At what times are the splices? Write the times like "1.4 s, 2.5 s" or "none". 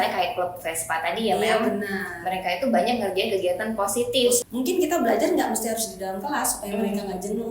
4.5 s